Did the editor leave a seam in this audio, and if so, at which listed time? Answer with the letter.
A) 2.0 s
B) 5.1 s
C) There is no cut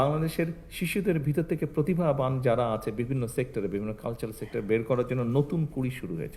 C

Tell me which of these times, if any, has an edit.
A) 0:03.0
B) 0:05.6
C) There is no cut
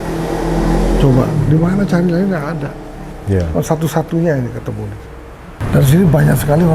B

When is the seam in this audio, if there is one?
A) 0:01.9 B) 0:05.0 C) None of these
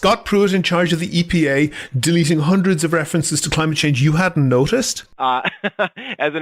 B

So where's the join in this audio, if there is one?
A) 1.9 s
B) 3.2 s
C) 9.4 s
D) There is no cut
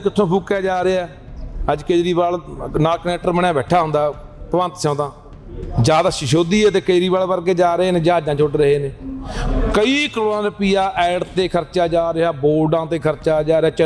D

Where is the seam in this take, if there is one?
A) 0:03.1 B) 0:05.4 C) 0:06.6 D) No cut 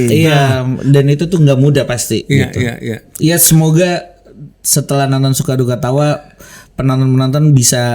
A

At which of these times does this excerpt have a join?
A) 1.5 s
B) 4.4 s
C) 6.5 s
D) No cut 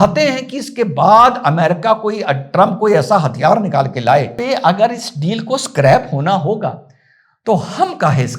B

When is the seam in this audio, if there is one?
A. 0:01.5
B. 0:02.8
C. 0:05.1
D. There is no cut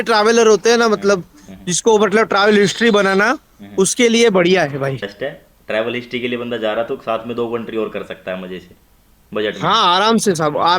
C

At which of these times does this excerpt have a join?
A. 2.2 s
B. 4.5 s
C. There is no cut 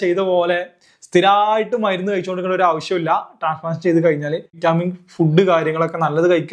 B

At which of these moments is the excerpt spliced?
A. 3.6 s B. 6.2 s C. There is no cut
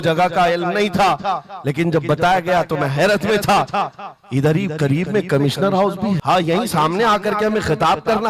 B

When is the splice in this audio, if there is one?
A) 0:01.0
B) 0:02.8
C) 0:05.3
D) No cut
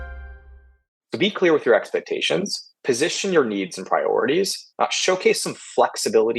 A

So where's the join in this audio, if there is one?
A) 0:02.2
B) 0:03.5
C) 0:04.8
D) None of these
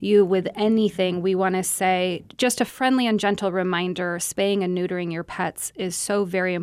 A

